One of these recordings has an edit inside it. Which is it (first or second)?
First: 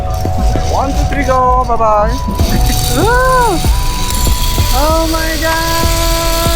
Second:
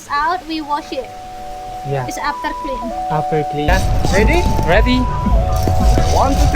second